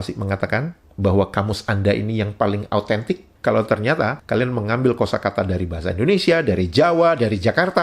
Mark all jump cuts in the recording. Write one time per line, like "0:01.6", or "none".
0:03.3
0:04.2